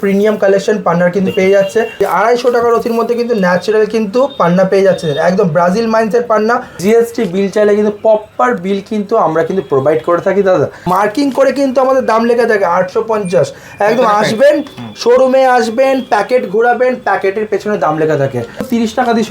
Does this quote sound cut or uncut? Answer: cut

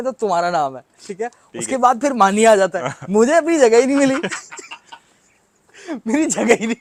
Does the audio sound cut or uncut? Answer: uncut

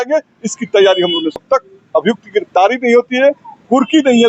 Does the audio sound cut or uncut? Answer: cut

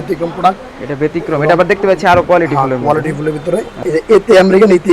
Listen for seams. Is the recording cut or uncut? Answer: cut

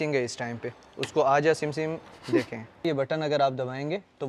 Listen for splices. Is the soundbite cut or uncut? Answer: cut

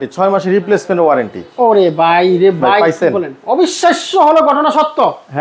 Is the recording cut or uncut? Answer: uncut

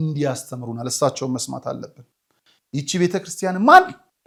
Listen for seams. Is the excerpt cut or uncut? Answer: uncut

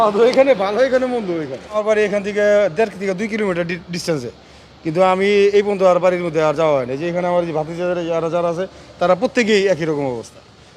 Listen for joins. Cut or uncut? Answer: cut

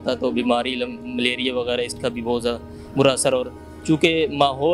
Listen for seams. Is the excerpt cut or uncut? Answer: uncut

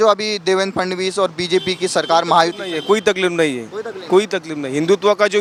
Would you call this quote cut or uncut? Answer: uncut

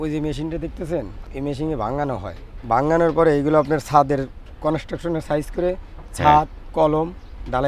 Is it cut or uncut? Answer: cut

